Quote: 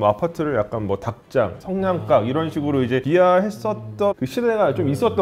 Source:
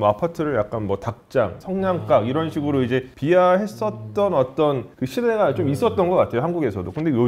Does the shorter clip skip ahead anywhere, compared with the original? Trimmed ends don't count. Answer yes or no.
yes